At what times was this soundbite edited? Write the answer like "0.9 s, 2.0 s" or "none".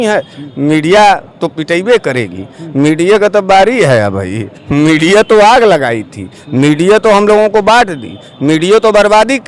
none